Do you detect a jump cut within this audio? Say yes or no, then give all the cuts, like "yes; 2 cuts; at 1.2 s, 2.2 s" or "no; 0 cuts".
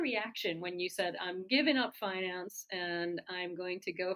no; 0 cuts